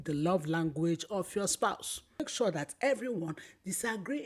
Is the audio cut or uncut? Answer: cut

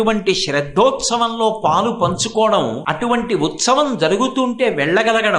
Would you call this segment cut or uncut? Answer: cut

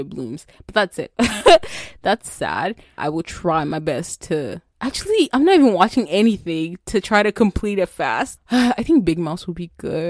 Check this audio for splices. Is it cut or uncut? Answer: cut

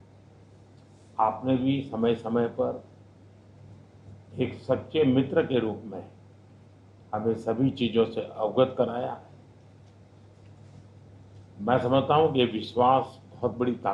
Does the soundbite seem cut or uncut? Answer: uncut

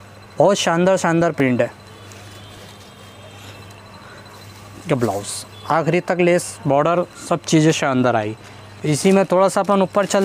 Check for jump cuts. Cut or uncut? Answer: uncut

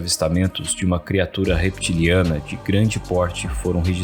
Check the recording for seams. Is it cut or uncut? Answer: uncut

